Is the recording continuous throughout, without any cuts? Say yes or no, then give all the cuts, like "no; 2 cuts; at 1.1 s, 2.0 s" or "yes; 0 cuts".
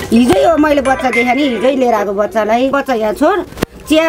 no; 1 cut; at 2.8 s